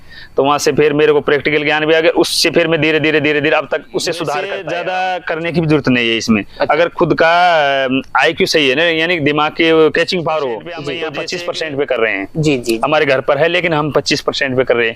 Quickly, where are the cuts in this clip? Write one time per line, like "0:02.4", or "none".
0:04.6
0:11.0